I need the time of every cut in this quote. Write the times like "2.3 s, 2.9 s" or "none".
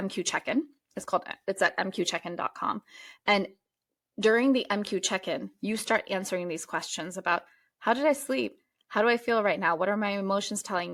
none